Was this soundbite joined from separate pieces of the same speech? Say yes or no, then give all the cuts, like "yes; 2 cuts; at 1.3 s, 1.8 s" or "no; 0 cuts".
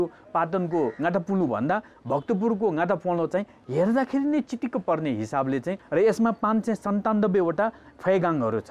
yes; 1 cut; at 5.8 s